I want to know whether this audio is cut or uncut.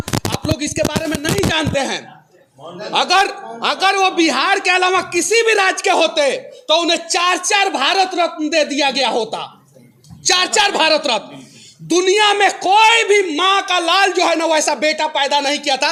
uncut